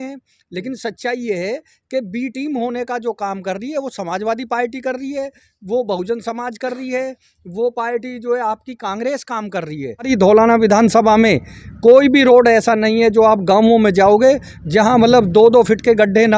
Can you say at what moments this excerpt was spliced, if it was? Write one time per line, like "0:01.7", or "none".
0:10.1

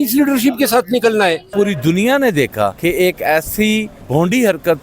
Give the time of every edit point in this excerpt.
0:01.5
0:02.8
0:04.0

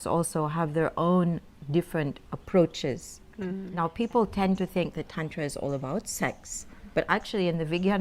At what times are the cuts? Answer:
0:03.6

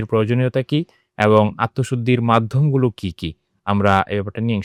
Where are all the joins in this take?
none

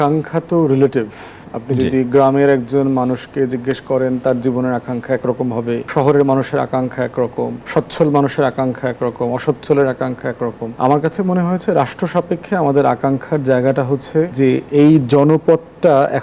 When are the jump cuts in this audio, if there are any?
0:05.9
0:07.6
0:10.7
0:14.3

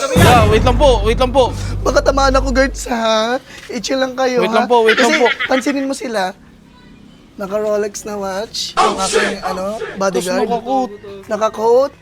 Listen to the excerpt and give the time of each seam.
none

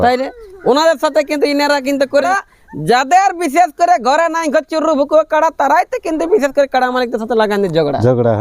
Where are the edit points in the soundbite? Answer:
0:02.3

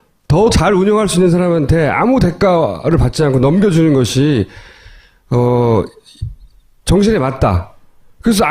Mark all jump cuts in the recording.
0:02.4

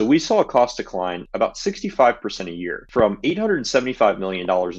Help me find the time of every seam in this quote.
0:01.2
0:02.8

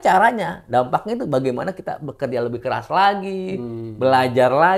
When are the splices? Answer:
none

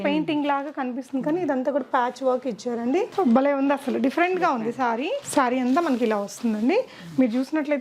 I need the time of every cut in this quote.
0:05.2

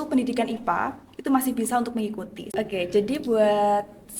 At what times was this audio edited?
0:02.5

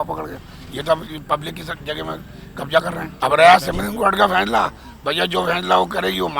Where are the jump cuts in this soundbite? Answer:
0:03.0

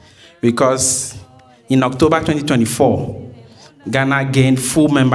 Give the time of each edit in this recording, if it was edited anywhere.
none

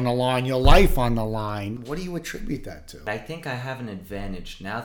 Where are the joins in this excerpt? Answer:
0:01.8
0:03.0

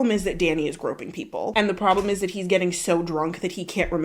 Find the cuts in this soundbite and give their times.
0:01.5

